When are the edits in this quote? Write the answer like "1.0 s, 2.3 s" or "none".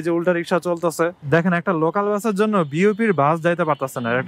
1.2 s